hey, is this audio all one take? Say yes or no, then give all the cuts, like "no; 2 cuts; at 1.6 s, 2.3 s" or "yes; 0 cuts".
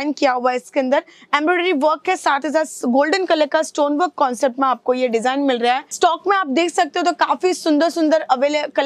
no; 1 cut; at 5.9 s